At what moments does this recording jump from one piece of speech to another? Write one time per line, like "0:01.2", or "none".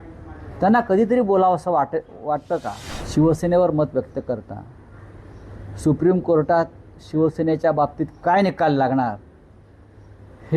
0:02.9